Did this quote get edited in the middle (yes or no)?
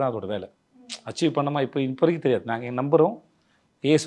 no